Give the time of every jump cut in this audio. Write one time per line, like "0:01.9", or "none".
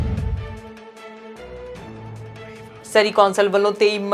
0:02.8